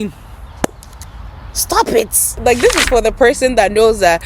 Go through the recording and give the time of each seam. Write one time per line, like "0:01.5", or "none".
0:02.3